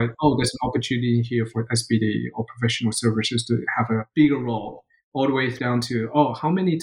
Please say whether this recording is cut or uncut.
cut